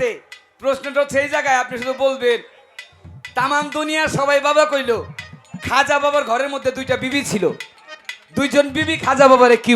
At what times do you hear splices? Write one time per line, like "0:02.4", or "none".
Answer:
none

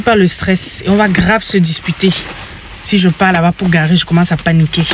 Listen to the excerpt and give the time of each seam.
none

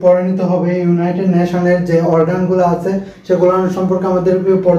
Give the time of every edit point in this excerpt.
none

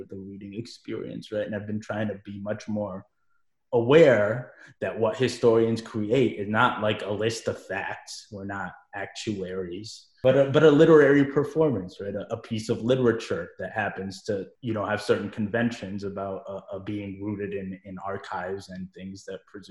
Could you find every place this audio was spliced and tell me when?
none

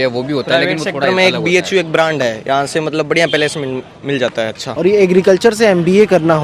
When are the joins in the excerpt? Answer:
0:04.7

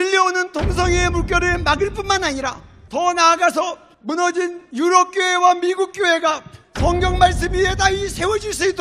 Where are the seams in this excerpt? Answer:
none

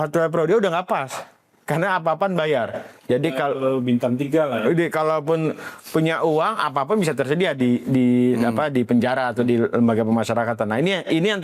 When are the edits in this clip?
none

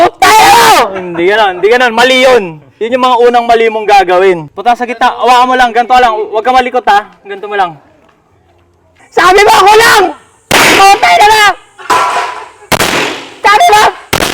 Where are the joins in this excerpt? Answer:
0:04.5
0:08.9

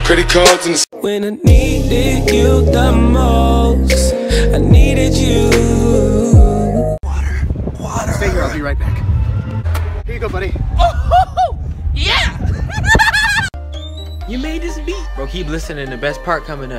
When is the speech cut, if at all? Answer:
none

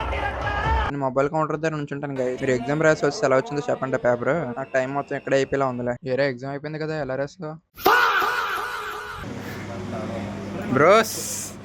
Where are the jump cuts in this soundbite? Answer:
none

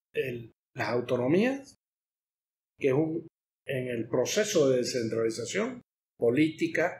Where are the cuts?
none

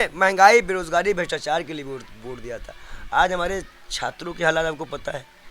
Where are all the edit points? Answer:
none

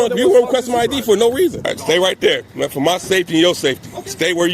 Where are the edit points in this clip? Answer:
0:01.6

